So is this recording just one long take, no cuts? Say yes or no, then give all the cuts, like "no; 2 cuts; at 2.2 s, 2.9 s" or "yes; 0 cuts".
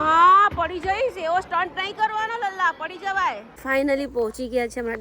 no; 1 cut; at 3.5 s